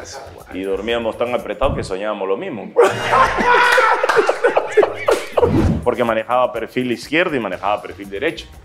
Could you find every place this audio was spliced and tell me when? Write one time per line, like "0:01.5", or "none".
0:05.7